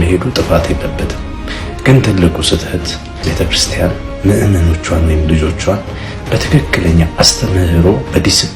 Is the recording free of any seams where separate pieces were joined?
no; 1 cut; at 3.2 s

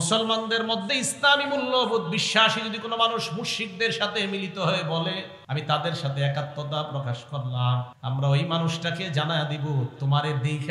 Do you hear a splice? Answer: yes; 2 cuts; at 5.3 s, 7.9 s

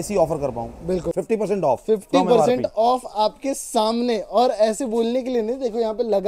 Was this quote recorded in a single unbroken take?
no; 1 cut; at 1.1 s

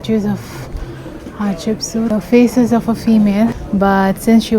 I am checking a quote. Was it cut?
yes; 2 cuts; at 2.1 s, 3.6 s

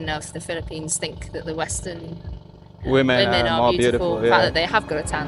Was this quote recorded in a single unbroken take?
yes; 0 cuts

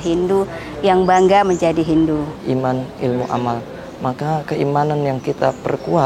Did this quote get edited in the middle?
yes; 1 cut; at 2.3 s

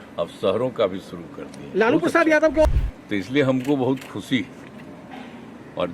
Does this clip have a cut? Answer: yes; 1 cut; at 2.6 s

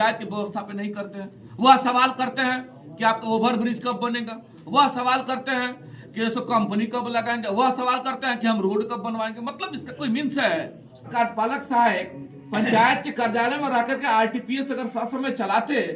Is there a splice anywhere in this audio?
yes; 1 cut; at 11.1 s

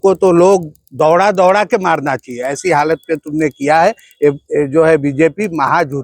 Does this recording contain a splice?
no; 0 cuts

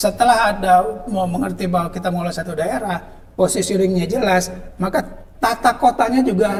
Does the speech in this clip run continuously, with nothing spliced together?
yes; 0 cuts

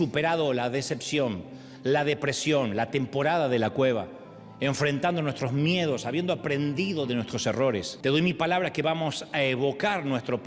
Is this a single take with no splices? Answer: no; 1 cut; at 7.9 s

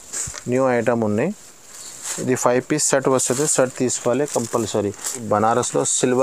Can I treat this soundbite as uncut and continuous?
no; 1 cut; at 5.2 s

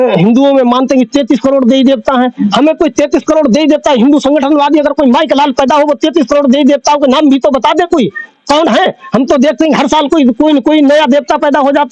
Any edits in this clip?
no; 0 cuts

